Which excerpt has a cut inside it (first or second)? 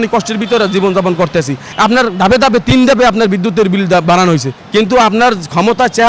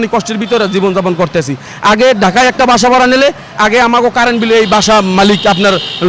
first